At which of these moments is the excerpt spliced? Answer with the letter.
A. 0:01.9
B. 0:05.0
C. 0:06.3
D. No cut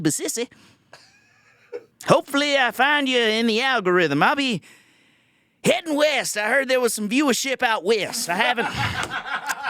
A